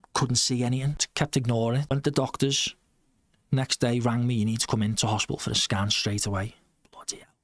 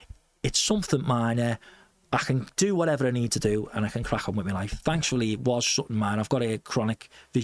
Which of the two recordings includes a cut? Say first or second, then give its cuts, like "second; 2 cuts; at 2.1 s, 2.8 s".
first; 2 cuts; at 1.0 s, 1.9 s